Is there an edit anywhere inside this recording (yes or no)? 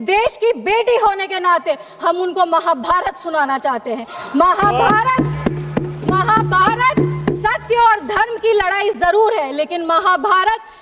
no